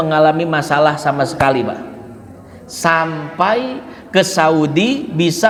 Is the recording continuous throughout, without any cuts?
yes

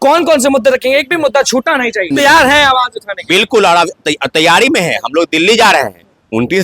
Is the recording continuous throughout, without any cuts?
no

